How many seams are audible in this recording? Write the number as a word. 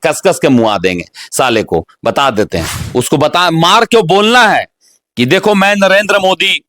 one